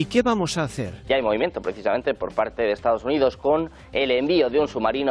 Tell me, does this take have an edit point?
yes; 1 cut; at 0.9 s

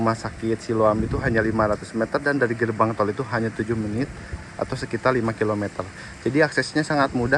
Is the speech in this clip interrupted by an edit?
no; 0 cuts

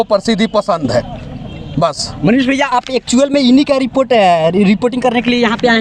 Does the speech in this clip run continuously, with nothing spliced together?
yes; 0 cuts

